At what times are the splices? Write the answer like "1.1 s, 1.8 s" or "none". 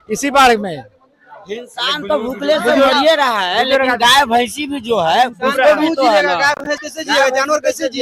none